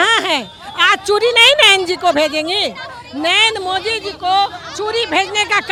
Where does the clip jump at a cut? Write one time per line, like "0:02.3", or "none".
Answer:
none

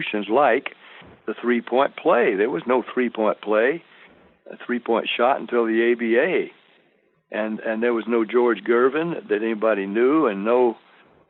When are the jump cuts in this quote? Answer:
none

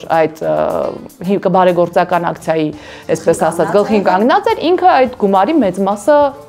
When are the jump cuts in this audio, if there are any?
none

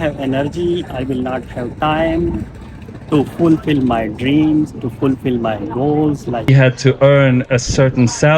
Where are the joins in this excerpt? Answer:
0:06.5

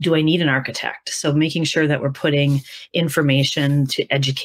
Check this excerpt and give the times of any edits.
none

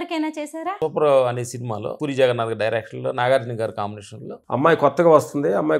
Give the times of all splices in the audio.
0:00.8
0:01.9

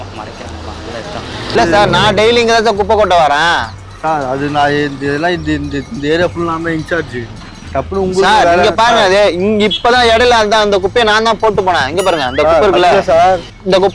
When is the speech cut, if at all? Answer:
none

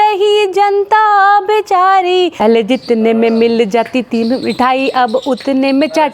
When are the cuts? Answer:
0:02.4

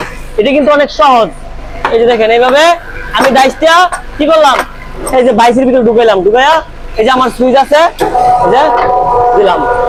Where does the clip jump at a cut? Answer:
none

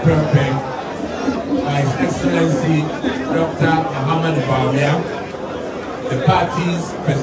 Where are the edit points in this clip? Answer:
none

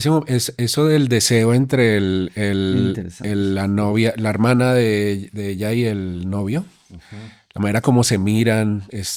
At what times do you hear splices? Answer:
none

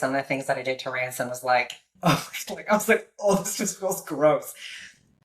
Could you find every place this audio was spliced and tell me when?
0:01.8

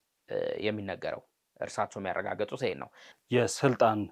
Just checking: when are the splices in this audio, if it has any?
0:03.0

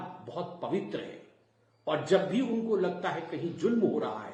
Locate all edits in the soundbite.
none

